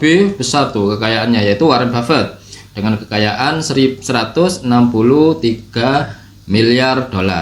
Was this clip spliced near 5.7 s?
no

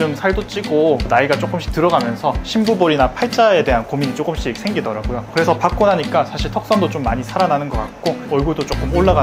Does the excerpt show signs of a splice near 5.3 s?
yes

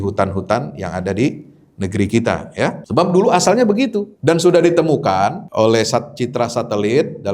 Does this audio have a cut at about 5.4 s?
yes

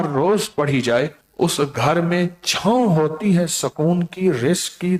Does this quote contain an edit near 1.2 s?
yes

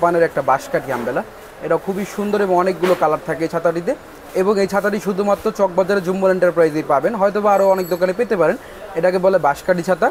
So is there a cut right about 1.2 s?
no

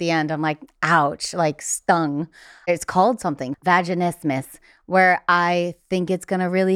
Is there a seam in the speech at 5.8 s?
no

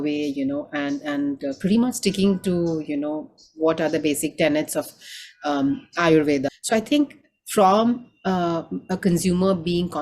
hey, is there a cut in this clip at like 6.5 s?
yes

